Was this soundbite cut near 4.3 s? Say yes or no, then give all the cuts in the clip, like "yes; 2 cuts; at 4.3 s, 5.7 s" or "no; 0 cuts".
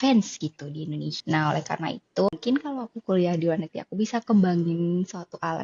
no; 2 cuts; at 1.1 s, 2.3 s